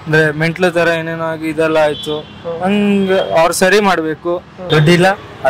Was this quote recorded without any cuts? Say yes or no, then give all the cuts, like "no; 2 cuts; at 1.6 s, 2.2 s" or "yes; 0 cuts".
no; 1 cut; at 4.5 s